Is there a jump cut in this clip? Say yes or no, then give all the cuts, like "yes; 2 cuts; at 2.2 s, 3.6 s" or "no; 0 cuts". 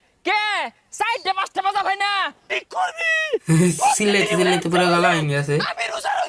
yes; 1 cut; at 2.5 s